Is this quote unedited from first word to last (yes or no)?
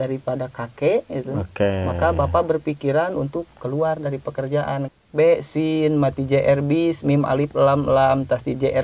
no